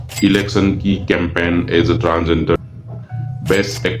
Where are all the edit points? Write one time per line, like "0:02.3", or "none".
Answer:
0:02.6